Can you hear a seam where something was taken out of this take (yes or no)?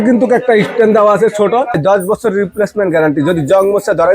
yes